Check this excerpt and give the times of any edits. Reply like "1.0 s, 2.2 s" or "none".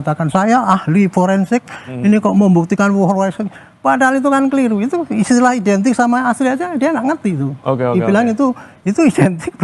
none